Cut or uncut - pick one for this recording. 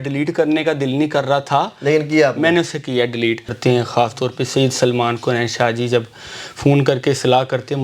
cut